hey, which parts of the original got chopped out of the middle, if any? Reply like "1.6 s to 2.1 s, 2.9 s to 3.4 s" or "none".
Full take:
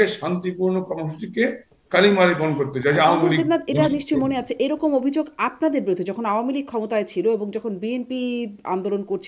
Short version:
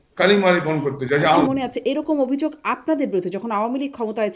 3.2 s to 4.2 s